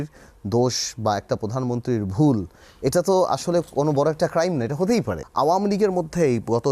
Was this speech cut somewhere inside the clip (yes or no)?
yes